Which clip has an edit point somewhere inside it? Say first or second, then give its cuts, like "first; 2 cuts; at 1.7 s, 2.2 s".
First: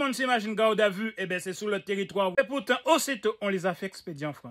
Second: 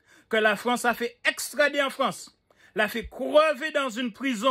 first; 1 cut; at 2.4 s